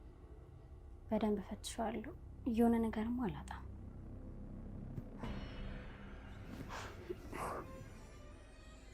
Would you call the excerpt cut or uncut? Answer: uncut